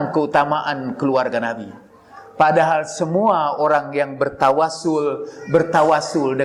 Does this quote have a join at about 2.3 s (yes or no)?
no